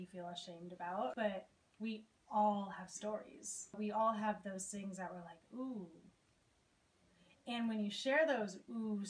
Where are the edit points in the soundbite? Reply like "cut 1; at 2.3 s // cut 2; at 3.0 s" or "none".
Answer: cut 1; at 1.1 s // cut 2; at 3.8 s